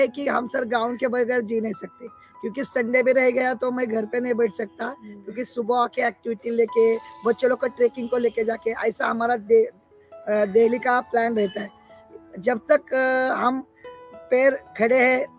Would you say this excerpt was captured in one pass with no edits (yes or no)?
yes